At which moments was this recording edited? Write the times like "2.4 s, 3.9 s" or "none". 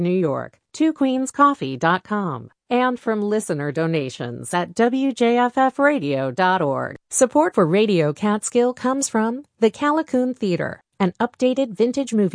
7.0 s

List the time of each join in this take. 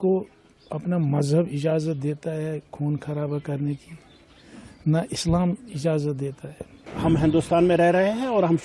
6.9 s

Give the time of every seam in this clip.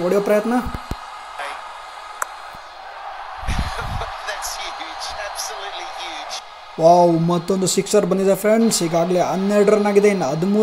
none

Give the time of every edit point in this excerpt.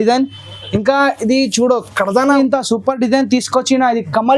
2.3 s

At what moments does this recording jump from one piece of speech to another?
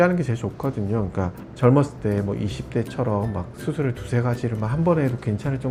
none

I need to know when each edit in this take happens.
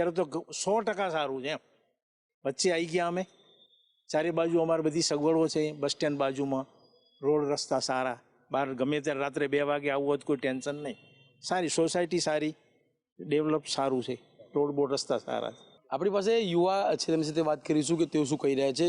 none

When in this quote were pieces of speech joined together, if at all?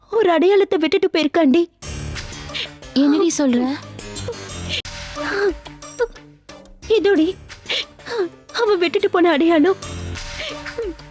none

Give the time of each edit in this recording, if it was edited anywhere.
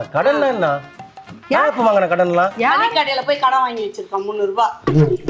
none

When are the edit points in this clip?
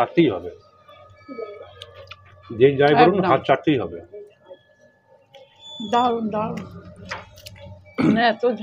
5.7 s

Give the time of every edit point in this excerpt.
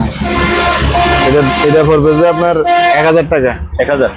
none

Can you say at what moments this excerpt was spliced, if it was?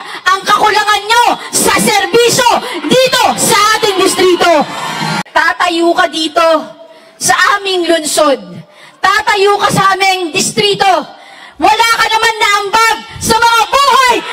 5.2 s

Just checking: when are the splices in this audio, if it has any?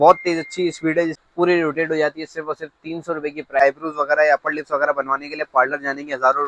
1.2 s, 3.6 s

